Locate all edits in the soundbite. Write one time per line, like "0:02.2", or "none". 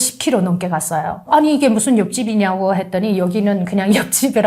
0:01.3